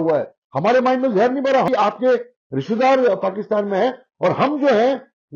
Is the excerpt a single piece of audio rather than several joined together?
no; 1 cut; at 1.7 s

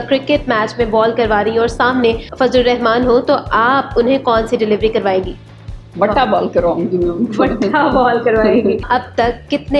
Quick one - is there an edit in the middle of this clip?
yes; 2 cuts; at 2.3 s, 8.8 s

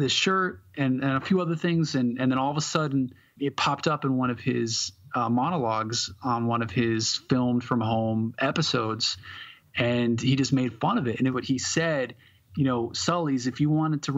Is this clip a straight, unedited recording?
no; 2 cuts; at 3.3 s, 11.3 s

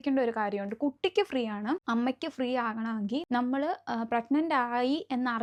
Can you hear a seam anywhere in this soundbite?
no; 0 cuts

